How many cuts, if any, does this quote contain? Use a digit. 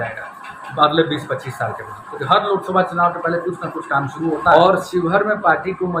1